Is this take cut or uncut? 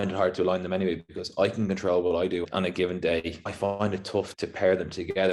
uncut